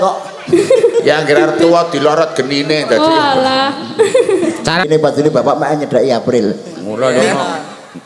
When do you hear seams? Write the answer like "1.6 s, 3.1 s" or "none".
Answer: 4.9 s